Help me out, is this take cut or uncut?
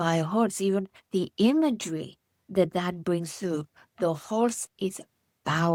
uncut